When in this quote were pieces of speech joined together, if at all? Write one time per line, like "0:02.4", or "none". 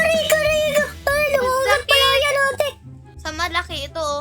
0:03.1